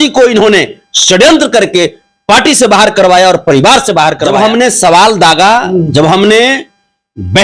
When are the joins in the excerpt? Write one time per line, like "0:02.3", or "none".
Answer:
0:04.3